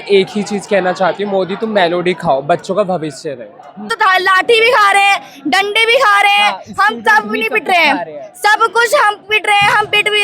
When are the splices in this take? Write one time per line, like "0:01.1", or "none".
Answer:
0:03.9